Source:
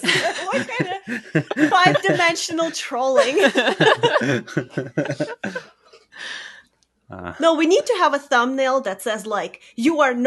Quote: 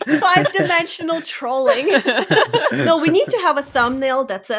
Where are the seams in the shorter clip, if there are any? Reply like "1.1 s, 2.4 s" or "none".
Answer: 2.8 s

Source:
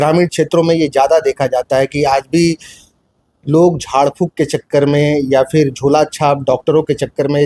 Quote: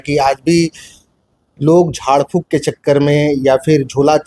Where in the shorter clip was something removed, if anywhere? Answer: none

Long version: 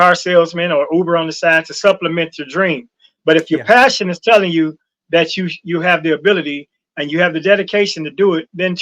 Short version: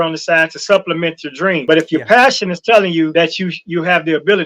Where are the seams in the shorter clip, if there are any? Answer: 1.6 s, 3.1 s

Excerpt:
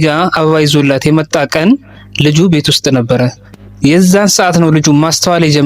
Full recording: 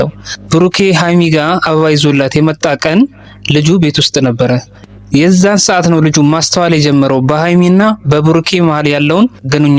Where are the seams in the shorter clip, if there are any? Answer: none

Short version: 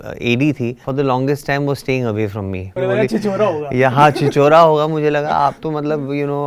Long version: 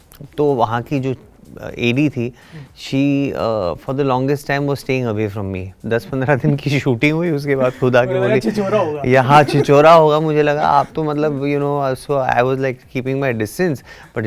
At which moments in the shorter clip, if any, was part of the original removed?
0.8 s, 2.8 s

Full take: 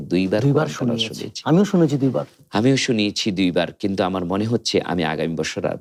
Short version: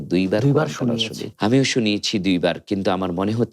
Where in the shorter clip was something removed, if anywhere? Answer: 1.2 s

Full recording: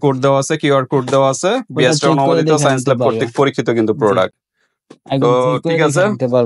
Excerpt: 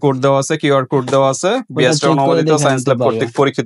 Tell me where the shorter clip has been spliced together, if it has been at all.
none

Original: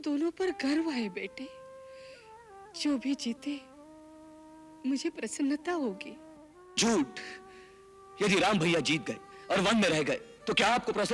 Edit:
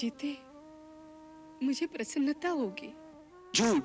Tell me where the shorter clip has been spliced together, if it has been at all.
none

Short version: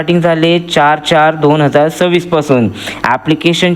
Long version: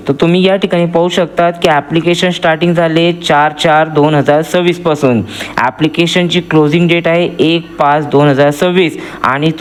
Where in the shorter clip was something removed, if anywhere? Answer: none

